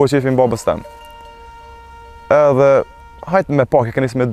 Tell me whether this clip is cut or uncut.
uncut